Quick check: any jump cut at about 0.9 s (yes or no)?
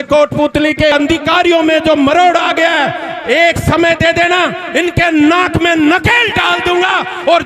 yes